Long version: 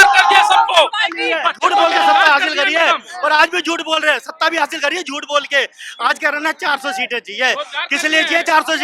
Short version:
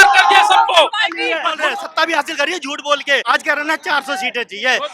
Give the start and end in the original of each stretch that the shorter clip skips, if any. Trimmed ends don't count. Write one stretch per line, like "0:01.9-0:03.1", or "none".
0:01.5-0:04.0
0:05.7-0:06.0